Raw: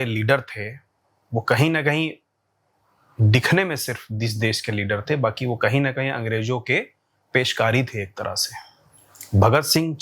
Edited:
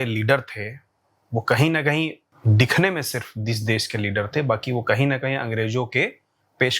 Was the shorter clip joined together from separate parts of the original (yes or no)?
yes